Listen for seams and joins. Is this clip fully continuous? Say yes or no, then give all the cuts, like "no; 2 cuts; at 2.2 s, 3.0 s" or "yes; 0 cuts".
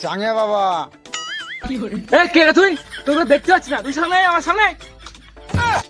yes; 0 cuts